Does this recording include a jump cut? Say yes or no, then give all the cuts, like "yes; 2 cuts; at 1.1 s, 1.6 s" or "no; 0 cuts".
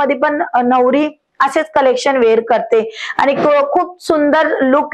no; 0 cuts